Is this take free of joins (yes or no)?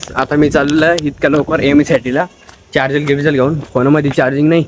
yes